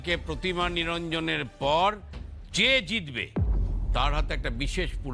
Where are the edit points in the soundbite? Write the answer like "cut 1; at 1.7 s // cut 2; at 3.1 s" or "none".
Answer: none